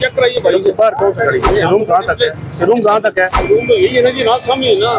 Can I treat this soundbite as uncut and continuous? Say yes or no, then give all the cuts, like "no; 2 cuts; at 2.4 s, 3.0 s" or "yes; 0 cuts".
no; 2 cuts; at 1.5 s, 3.4 s